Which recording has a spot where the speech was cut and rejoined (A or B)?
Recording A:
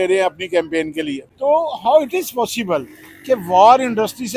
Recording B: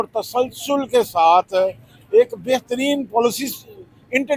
A